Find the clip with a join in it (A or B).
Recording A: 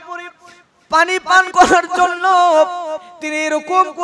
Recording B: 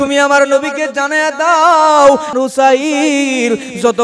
B